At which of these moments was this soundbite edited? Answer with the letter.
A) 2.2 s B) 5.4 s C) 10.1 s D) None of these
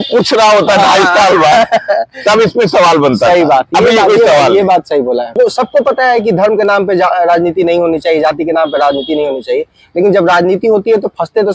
B